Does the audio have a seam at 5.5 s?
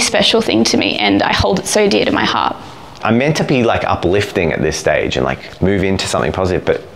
no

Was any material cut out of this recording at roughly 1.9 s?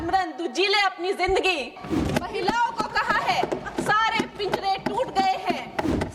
yes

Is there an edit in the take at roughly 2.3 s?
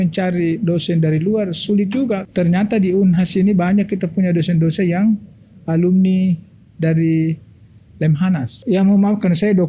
yes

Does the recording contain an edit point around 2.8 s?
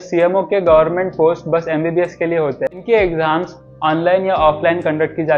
yes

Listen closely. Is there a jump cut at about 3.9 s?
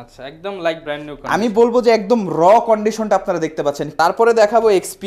yes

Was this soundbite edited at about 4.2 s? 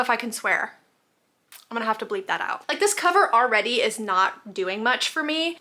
no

